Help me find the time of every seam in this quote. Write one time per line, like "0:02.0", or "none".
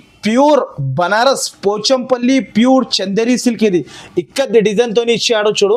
none